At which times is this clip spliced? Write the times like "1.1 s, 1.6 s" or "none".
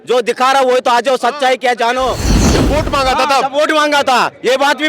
2.6 s